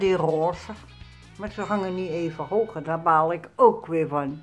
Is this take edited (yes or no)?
no